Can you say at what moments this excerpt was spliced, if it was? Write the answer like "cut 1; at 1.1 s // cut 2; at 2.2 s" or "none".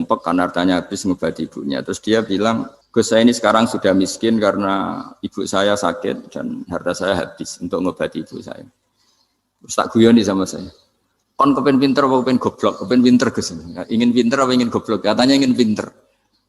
cut 1; at 2.8 s